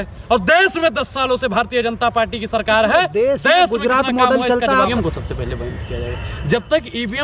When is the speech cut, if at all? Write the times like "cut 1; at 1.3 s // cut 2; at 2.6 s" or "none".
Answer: cut 1; at 4.9 s